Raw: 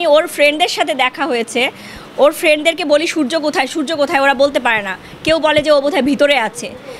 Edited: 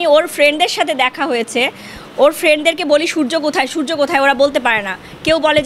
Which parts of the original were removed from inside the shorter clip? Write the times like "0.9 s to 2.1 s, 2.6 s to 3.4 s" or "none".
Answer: none

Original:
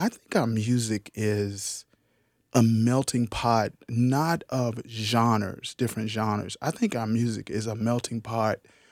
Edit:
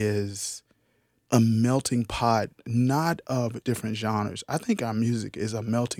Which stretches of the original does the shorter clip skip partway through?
4.8 s to 5.7 s

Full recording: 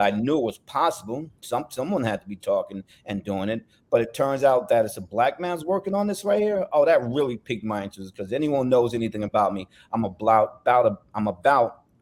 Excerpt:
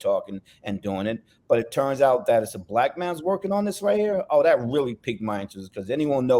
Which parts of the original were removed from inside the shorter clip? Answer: none

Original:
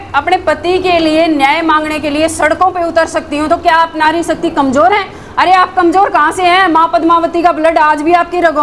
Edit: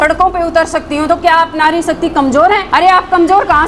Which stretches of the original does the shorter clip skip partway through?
5.1 s to 5.3 s

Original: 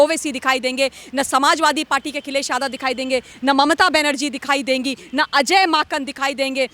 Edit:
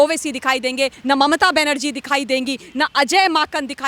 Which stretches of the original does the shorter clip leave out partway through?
1.0 s to 3.3 s

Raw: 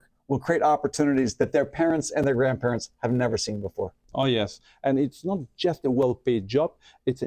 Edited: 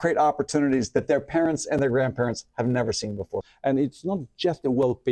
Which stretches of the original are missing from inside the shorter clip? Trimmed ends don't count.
4.0 s to 4.7 s

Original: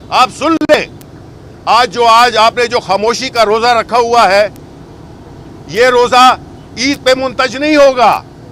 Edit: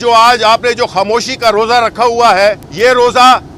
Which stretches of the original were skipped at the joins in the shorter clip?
4.6 s to 5.6 s

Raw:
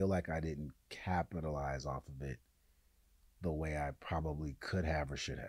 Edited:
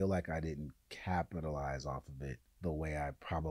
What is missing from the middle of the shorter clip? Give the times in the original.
2.5 s to 3.3 s

